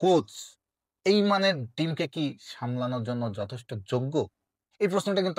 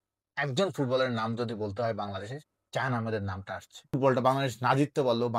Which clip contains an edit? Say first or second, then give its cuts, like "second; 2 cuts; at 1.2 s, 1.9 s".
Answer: second; 1 cut; at 4.0 s